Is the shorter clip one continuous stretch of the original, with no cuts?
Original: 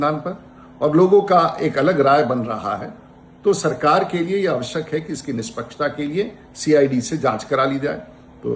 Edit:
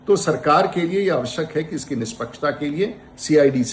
yes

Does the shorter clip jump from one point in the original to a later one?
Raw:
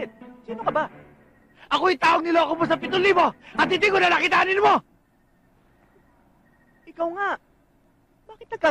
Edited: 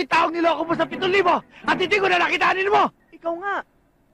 yes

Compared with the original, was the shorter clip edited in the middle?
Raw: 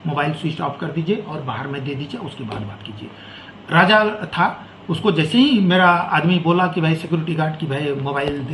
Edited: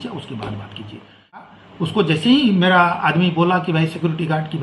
yes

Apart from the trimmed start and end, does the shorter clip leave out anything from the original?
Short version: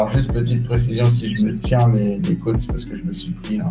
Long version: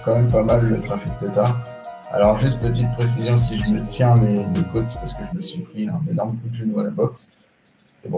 no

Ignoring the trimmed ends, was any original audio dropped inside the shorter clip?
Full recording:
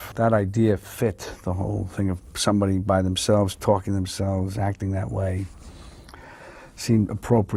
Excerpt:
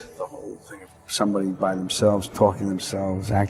no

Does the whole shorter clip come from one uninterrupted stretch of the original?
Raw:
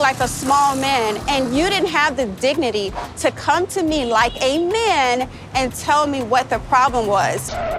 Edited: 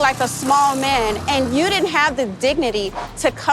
yes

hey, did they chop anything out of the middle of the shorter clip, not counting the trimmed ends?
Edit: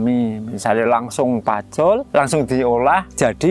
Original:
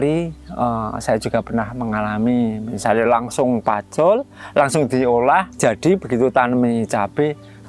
yes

